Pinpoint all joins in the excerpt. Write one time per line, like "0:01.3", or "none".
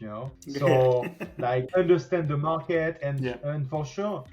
0:01.7